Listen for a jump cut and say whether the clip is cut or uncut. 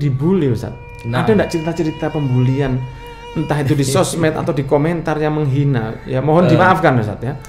uncut